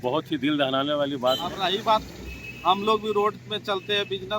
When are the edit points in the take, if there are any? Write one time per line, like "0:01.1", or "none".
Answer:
0:01.5